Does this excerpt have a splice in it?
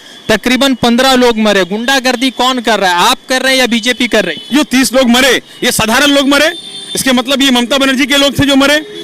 yes; 1 cut; at 4.5 s

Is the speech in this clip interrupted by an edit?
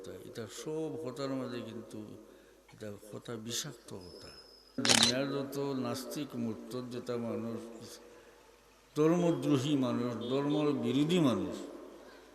yes; 1 cut; at 4.8 s

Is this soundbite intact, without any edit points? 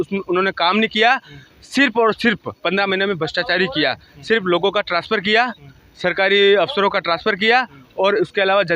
yes; 0 cuts

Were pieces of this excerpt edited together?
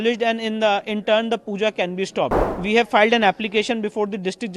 yes; 1 cut; at 2.5 s

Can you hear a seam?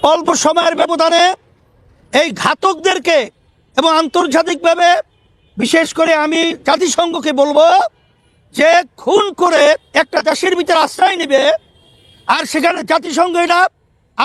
no; 0 cuts

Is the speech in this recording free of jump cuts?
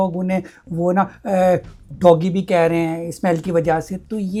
yes; 0 cuts

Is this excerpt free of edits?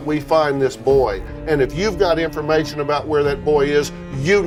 yes; 0 cuts

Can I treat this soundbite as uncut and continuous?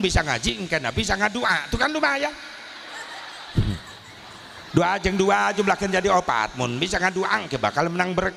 yes; 0 cuts

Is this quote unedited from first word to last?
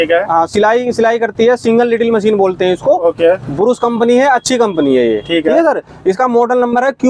yes; 0 cuts

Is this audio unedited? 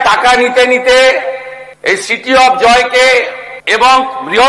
yes; 0 cuts

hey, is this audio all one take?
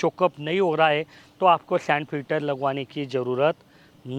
yes; 0 cuts

